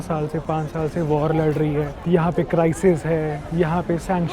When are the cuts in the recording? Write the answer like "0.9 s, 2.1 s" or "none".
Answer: 2.0 s